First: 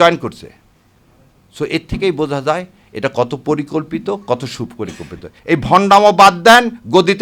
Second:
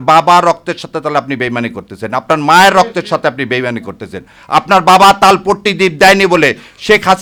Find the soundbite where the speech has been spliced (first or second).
first